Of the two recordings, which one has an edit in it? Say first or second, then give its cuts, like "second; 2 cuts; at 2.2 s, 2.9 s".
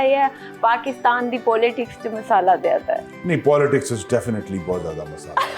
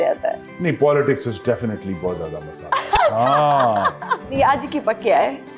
second; 1 cut; at 4.3 s